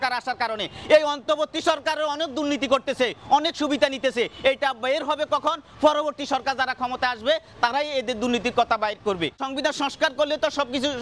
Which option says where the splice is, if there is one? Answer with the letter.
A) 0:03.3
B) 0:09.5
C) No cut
B